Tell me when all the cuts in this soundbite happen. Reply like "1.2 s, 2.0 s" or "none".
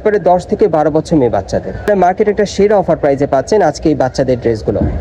1.9 s